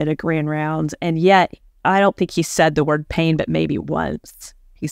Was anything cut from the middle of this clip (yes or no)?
no